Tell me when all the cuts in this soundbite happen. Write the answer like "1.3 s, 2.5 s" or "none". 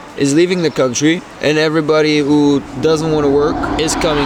none